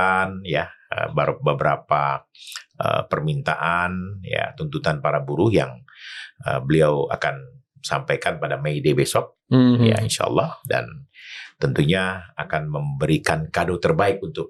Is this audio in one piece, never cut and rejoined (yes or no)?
yes